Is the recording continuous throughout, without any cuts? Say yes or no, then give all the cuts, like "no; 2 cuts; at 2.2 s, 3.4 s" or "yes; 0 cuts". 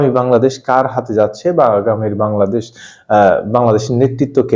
yes; 0 cuts